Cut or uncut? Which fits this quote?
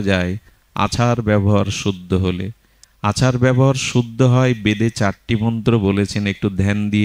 uncut